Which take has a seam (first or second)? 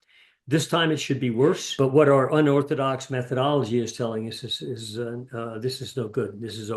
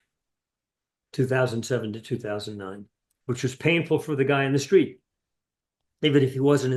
first